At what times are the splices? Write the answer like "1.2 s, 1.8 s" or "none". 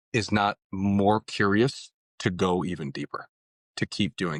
none